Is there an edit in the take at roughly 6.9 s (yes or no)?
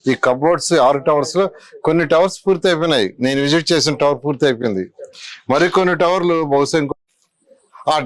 yes